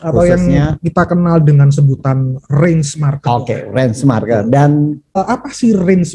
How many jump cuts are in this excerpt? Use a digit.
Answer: 1